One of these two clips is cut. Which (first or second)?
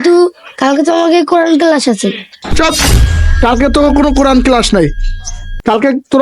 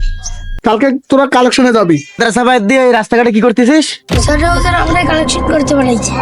second